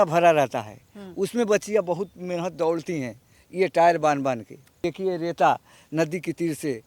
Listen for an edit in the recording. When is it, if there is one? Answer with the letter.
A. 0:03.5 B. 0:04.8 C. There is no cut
B